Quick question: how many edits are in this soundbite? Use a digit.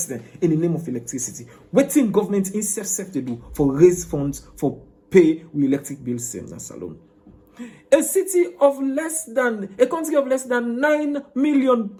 0